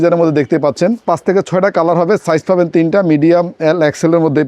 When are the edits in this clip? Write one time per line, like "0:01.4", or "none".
0:01.0